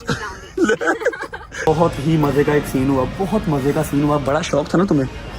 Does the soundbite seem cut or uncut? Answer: cut